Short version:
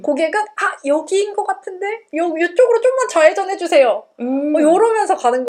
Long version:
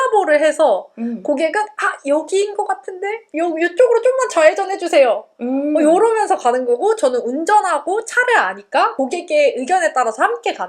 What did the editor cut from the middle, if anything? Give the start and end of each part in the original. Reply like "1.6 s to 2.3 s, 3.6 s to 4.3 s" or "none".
none